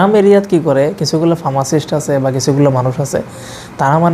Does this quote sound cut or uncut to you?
uncut